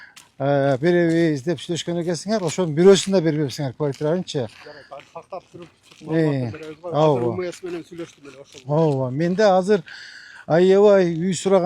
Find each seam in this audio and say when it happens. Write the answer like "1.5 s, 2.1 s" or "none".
none